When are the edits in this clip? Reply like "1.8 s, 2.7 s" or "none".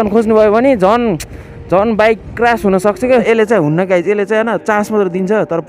3.2 s

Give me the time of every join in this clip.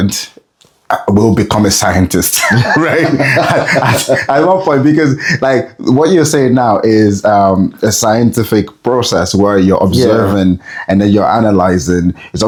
none

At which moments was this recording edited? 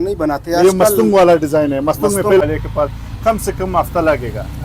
2.4 s

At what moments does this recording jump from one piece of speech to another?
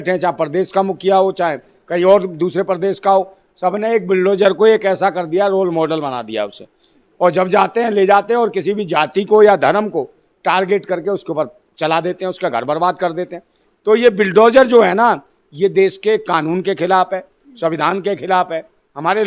none

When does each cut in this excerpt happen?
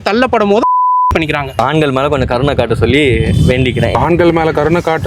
1.6 s, 3.9 s

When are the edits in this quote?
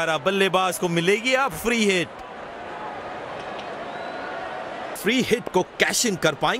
2.6 s, 4.9 s

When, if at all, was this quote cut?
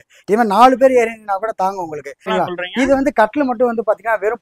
2.3 s

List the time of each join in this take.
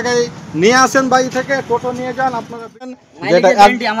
3.0 s

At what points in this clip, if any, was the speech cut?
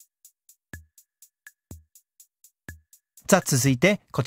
1.0 s, 3.0 s

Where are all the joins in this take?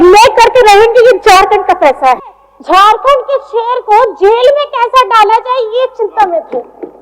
2.2 s

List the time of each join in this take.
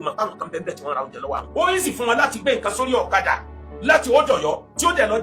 1.5 s

